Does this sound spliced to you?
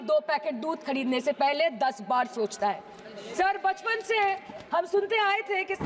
no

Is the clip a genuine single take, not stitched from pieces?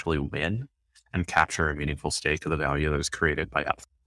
yes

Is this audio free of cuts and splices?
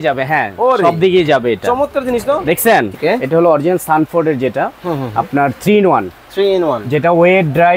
no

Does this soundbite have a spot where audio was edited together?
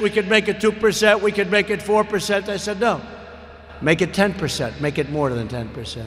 no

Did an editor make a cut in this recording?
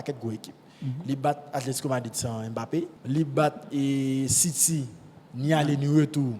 yes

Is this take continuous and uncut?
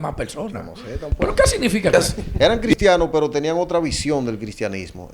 no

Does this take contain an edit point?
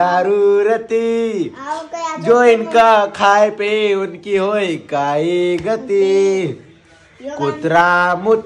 no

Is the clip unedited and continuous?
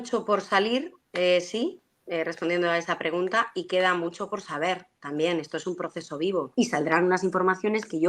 no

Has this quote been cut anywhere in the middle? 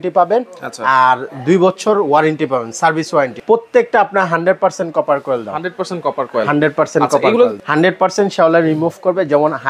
yes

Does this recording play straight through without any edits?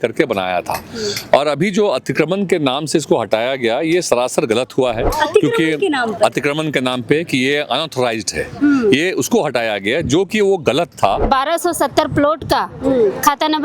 no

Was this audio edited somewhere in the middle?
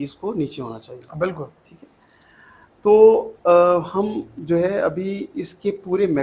no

